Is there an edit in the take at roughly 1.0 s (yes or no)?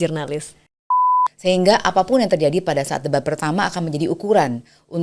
yes